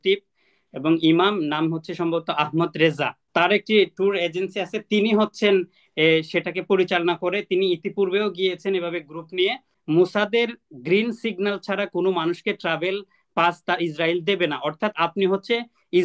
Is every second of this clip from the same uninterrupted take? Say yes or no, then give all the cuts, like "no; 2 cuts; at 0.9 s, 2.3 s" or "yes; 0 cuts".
no; 2 cuts; at 3.2 s, 9.7 s